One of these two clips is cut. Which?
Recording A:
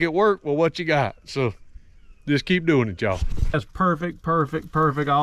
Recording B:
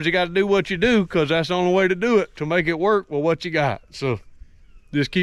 A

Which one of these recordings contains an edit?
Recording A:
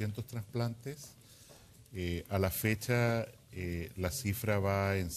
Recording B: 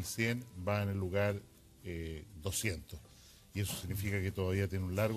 A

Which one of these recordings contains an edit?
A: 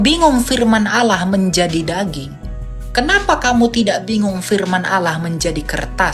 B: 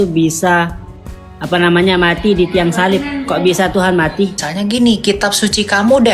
B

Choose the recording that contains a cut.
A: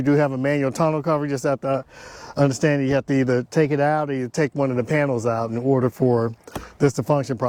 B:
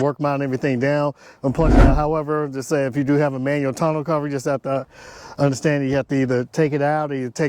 B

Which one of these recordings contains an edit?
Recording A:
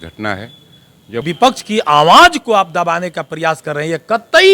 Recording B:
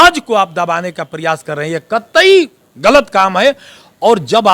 A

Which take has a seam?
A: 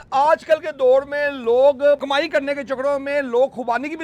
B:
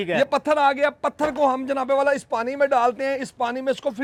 A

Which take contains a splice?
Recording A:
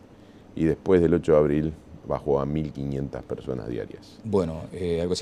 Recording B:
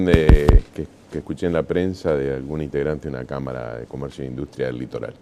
B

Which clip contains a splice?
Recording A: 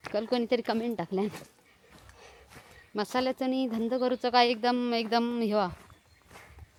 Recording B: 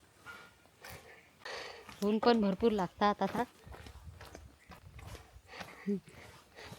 B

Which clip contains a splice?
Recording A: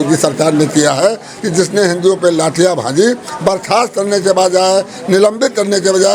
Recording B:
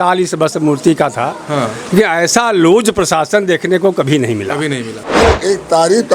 B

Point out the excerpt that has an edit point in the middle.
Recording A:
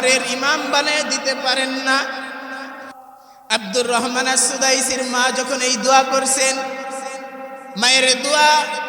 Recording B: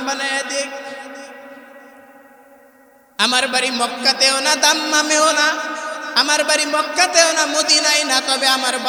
A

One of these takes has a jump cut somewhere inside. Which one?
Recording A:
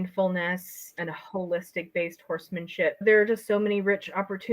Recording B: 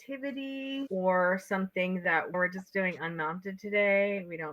A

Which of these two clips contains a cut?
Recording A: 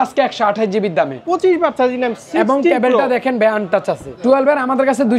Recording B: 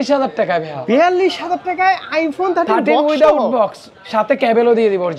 A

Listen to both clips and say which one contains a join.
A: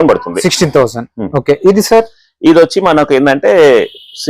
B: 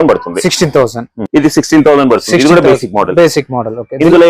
B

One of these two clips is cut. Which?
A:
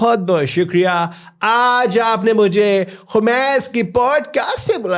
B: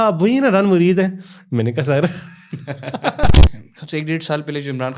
B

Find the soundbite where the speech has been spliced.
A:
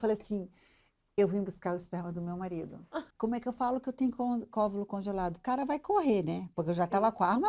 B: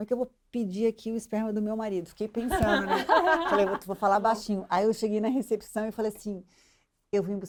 A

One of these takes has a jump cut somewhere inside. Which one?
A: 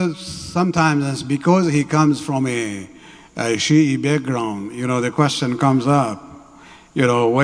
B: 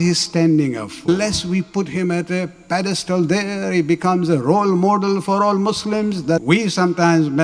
B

